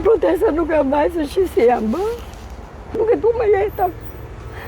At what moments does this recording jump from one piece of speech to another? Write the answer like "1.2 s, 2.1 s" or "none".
1.3 s, 2.9 s

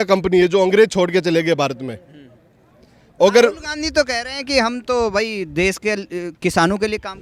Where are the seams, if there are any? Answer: none

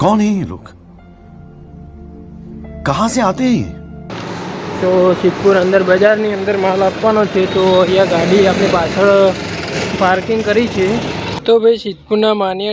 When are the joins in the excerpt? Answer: 4.1 s, 9.9 s, 11.3 s

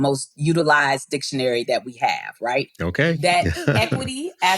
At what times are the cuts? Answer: 2.7 s

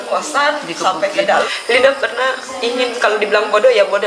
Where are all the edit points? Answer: 1.6 s

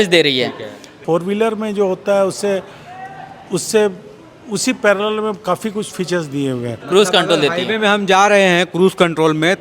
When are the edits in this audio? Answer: 1.0 s, 6.8 s

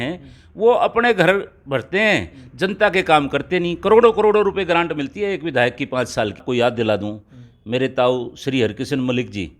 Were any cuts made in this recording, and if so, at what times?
6.4 s

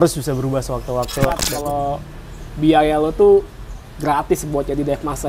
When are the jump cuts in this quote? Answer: 1.4 s

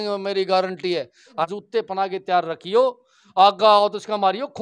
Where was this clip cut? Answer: 1.5 s

